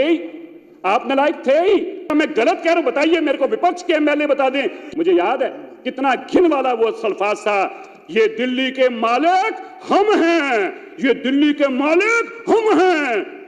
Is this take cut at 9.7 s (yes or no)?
no